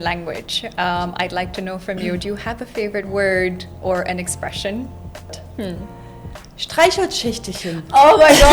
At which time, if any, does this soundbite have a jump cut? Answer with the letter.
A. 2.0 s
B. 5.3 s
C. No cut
B